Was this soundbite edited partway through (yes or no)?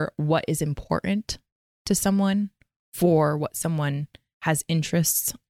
no